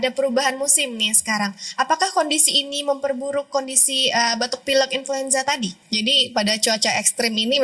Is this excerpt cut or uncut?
uncut